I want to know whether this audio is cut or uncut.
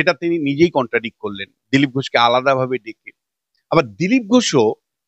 uncut